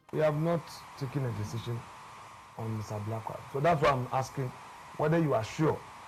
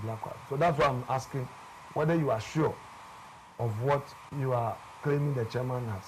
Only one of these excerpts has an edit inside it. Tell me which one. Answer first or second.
second